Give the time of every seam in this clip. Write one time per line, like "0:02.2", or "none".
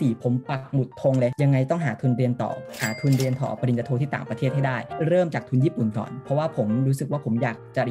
none